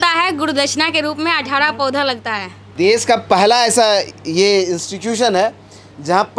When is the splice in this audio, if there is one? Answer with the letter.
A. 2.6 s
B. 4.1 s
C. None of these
A